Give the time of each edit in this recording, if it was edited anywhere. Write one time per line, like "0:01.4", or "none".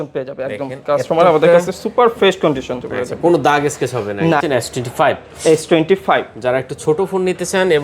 0:04.4

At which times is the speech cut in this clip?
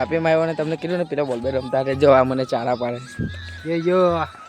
none

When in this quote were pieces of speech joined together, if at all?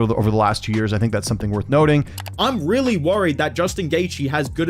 0:02.2

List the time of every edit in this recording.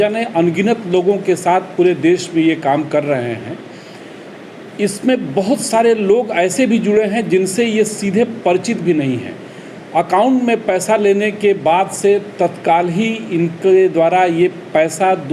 none

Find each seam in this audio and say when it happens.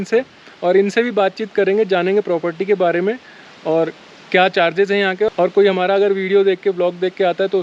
none

